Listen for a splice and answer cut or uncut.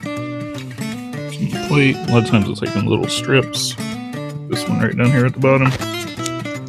cut